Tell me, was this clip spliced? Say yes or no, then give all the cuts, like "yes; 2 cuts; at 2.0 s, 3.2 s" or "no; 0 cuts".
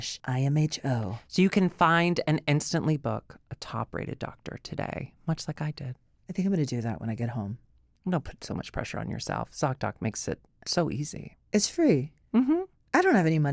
no; 0 cuts